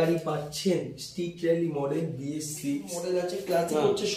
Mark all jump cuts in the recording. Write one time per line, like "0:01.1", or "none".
0:02.9